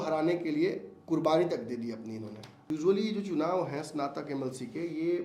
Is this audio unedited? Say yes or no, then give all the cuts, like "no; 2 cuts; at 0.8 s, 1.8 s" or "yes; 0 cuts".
no; 1 cut; at 2.5 s